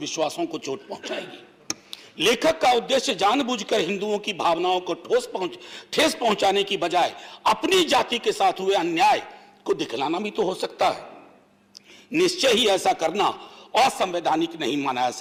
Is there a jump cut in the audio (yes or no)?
no